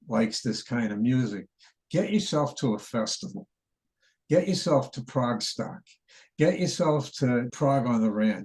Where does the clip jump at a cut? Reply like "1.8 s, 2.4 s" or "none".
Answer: 7.5 s